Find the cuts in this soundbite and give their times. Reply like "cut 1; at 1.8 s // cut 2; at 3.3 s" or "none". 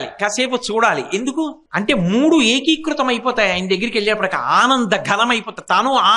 cut 1; at 1.6 s